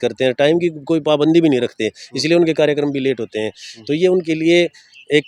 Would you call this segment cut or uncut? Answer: uncut